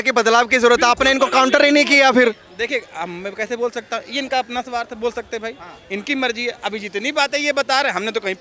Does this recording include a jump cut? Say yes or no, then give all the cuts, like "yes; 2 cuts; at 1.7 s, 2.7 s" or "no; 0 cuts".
no; 0 cuts